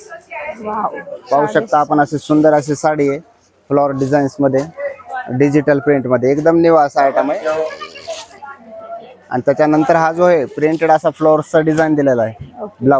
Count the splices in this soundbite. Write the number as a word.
zero